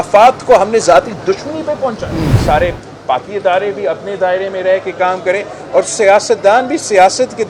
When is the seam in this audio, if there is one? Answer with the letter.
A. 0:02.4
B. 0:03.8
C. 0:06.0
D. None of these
A